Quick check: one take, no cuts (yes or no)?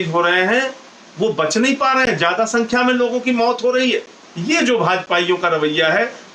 no